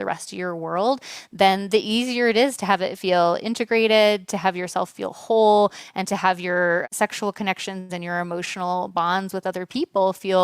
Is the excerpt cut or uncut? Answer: cut